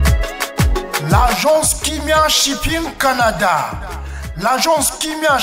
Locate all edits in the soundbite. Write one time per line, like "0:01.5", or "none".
0:01.0